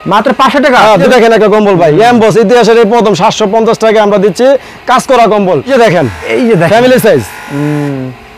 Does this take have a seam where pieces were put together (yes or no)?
yes